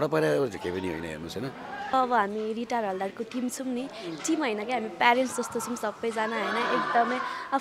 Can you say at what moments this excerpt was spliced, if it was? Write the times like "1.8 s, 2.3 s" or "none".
1.9 s